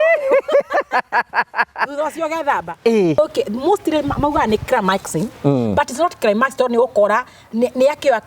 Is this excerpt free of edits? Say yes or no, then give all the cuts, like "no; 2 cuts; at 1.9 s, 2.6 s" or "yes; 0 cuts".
no; 1 cut; at 3.2 s